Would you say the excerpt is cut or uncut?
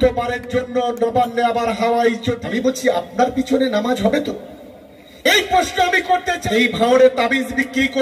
cut